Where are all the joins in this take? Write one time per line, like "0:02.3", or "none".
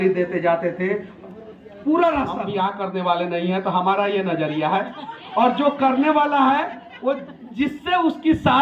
0:02.4